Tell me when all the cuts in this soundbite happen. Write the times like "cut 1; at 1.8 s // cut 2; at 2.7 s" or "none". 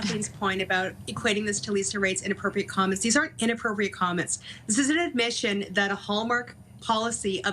none